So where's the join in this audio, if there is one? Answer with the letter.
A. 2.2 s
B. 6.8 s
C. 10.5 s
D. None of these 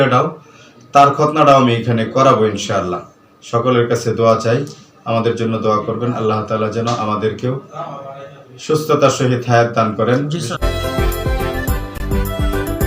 C